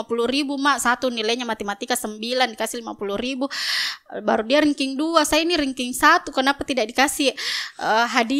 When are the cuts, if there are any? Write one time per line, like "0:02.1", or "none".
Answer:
none